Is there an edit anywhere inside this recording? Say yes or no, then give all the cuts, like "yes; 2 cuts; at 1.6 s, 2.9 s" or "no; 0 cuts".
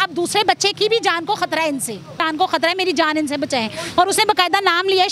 yes; 1 cut; at 2.3 s